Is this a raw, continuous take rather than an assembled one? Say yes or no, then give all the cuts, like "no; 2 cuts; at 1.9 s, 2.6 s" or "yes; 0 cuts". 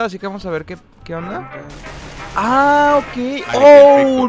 yes; 0 cuts